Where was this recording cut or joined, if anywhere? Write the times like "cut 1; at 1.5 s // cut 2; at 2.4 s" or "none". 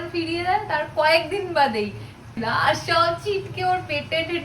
cut 1; at 2.3 s